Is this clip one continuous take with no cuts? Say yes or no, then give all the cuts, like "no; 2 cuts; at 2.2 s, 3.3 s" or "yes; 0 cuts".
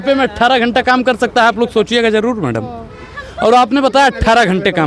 yes; 0 cuts